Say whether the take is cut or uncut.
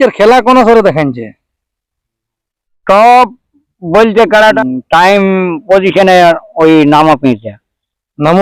cut